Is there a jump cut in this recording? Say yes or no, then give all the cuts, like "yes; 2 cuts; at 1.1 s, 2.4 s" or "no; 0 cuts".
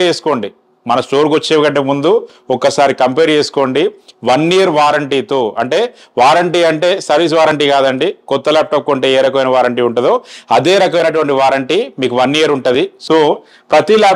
yes; 1 cut; at 13.0 s